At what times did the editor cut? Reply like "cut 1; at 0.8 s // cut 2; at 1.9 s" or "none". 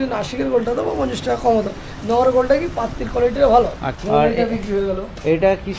cut 1; at 3.9 s